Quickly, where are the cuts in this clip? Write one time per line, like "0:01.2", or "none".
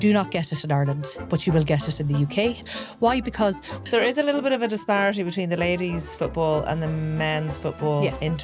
0:01.1
0:02.6
0:03.8